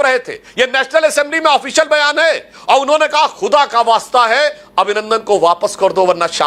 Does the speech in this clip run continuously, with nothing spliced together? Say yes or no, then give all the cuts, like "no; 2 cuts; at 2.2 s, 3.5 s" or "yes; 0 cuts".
yes; 0 cuts